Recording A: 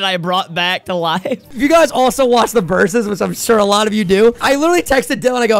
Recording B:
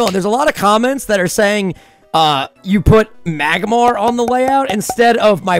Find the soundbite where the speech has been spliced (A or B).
A